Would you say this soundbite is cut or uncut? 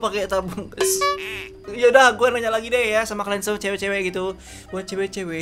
cut